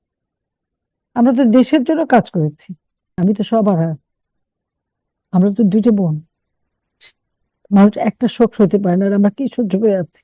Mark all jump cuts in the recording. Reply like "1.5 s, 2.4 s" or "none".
3.2 s